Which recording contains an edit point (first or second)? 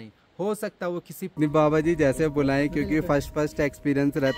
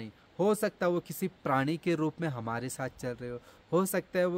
first